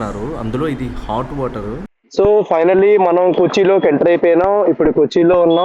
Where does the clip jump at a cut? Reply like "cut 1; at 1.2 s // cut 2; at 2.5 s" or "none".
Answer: cut 1; at 2.0 s